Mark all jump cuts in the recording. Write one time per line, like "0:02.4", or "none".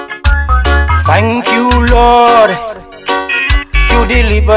none